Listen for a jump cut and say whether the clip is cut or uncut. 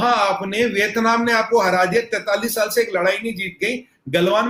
uncut